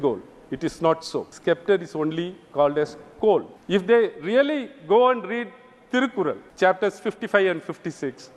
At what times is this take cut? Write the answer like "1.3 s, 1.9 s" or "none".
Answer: 1.3 s, 3.6 s, 6.5 s